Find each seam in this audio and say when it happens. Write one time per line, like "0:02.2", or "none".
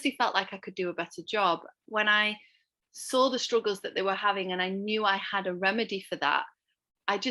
0:01.7